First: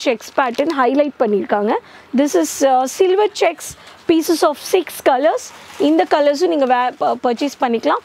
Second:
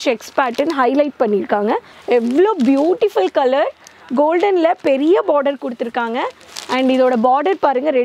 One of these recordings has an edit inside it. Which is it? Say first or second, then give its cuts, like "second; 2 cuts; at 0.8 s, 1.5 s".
second; 1 cut; at 1.9 s